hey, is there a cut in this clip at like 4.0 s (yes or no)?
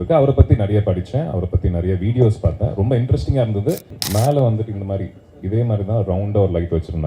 yes